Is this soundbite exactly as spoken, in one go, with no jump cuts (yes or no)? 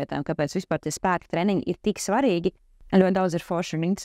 no